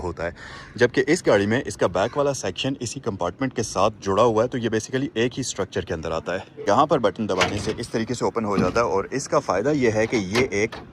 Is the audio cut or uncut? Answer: cut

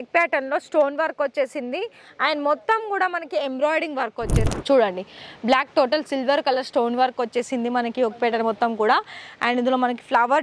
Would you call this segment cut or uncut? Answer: cut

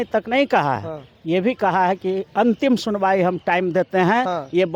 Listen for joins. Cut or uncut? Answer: uncut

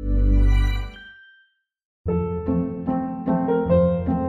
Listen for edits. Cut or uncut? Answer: cut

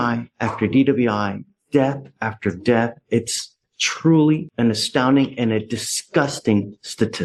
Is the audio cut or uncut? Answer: uncut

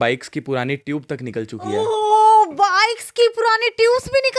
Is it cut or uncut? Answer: uncut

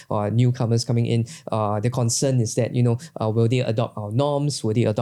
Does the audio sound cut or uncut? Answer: uncut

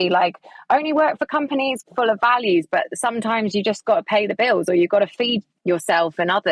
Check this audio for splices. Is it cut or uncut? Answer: cut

